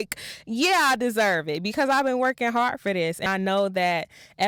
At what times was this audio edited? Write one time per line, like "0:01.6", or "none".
none